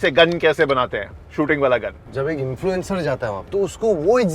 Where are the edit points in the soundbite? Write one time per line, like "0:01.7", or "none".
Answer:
0:02.0
0:03.4